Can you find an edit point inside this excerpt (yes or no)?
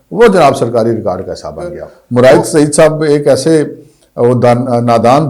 no